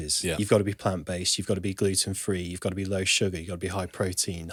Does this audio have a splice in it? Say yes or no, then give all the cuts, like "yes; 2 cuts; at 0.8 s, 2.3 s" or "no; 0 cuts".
no; 0 cuts